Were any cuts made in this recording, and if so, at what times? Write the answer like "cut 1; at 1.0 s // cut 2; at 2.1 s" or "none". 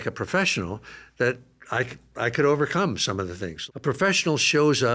cut 1; at 3.5 s